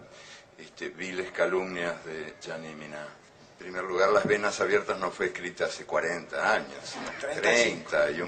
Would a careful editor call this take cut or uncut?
cut